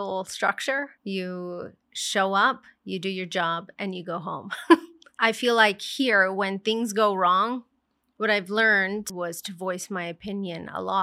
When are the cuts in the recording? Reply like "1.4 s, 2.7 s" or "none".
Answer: 0.9 s, 5.1 s, 9.1 s